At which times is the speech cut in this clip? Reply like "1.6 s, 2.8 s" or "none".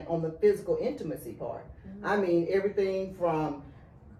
none